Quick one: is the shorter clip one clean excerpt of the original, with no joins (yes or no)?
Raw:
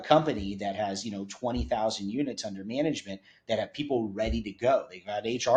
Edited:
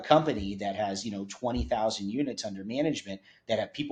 yes